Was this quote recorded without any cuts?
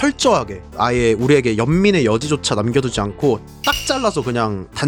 yes; 0 cuts

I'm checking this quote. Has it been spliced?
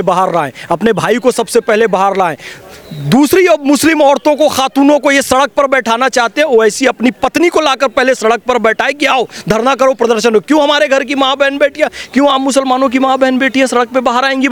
no; 0 cuts

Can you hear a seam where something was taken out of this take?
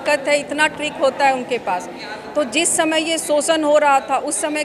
no; 0 cuts

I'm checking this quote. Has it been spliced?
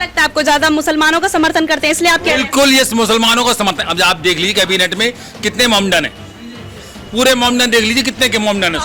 no; 0 cuts

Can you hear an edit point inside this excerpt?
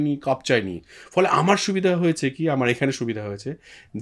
no; 0 cuts

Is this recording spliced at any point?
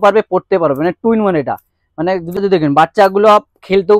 no; 0 cuts

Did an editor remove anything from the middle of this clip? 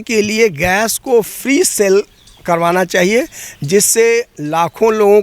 no; 0 cuts

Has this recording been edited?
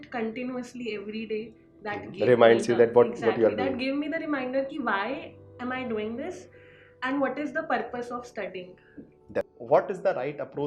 yes; 1 cut; at 9.6 s

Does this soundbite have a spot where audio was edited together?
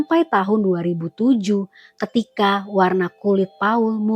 no; 0 cuts

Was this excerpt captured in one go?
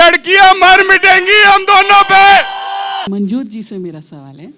no; 1 cut; at 3.1 s

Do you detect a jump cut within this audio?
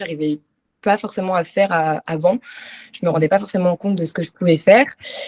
no; 0 cuts

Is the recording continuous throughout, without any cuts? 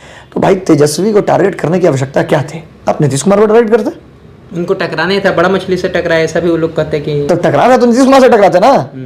yes; 0 cuts

